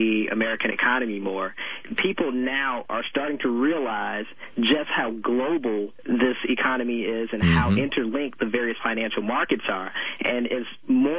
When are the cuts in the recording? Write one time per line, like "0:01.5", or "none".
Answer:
0:01.8
0:05.9